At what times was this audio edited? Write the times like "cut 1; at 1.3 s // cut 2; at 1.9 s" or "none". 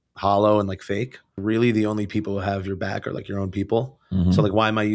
cut 1; at 1.4 s